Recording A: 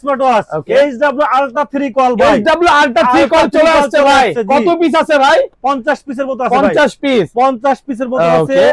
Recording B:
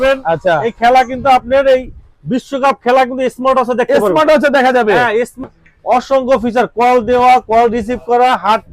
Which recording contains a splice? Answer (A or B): B